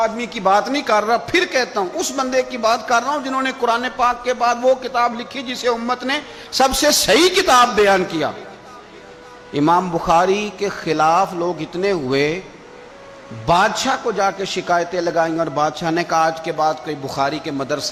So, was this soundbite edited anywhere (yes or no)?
no